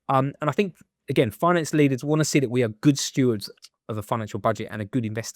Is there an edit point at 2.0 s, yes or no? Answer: no